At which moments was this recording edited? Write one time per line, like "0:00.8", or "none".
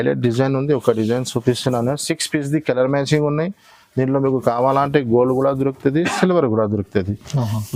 none